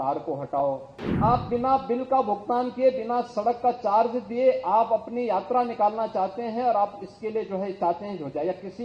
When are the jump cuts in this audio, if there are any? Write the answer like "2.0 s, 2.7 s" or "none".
1.0 s